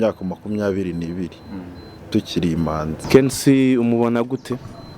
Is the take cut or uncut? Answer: cut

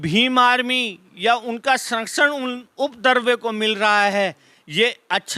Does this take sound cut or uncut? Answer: uncut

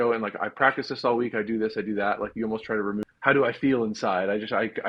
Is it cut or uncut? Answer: cut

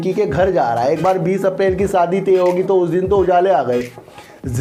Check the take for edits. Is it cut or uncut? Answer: uncut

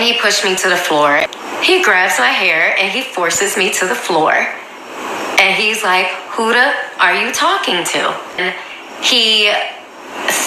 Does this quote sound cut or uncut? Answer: cut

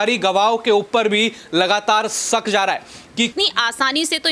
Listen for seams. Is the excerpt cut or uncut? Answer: cut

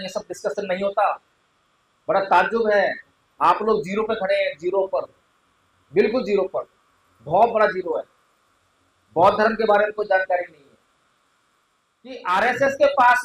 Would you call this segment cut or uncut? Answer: cut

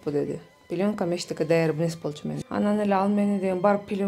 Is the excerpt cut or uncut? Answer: uncut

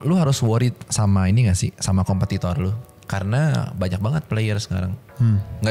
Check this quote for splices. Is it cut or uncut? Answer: uncut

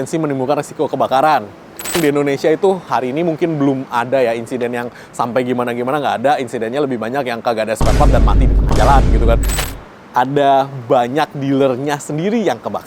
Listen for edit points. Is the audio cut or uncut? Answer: cut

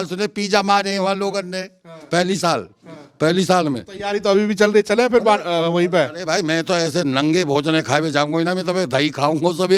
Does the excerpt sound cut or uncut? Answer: uncut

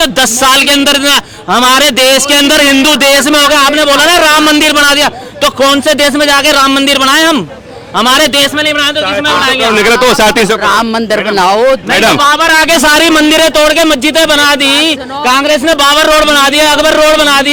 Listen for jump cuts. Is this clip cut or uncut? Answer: uncut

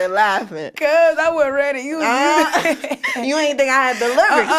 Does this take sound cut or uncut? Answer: uncut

